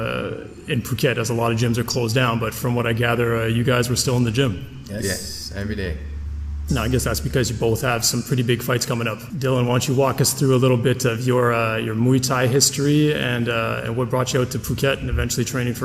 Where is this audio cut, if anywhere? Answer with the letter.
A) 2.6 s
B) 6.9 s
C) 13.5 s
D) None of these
B